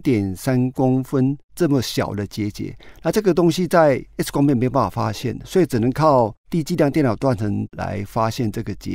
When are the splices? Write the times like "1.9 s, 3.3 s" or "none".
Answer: 4.1 s, 6.4 s, 7.7 s